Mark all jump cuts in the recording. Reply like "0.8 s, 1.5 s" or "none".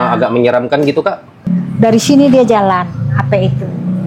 1.5 s